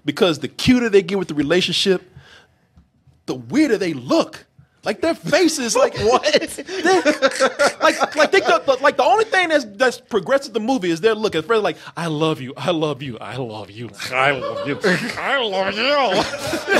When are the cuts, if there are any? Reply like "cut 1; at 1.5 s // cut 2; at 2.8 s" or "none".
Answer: none